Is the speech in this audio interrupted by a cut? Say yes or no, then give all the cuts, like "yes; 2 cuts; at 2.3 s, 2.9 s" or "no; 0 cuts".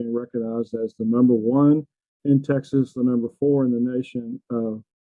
no; 0 cuts